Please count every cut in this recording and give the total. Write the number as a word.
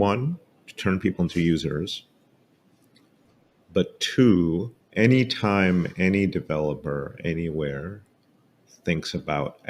one